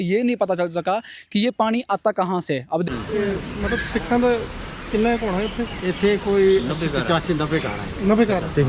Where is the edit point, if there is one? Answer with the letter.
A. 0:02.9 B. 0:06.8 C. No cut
A